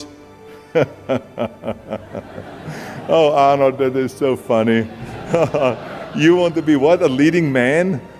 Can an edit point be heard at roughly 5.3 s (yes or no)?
no